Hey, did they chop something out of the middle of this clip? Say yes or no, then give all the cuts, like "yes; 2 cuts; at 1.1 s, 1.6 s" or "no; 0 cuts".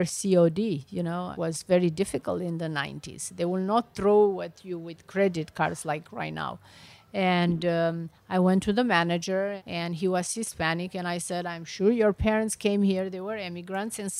no; 0 cuts